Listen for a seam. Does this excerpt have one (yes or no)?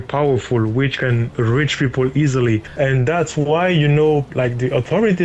yes